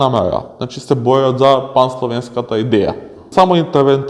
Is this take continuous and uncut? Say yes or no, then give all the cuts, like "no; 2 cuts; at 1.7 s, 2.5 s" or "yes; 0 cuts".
no; 1 cut; at 3.2 s